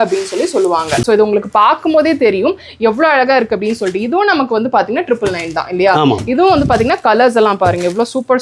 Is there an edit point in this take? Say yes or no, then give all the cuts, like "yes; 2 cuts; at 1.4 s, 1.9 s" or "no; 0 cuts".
yes; 1 cut; at 1.0 s